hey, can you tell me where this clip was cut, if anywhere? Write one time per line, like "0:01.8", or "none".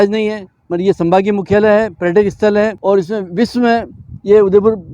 0:02.8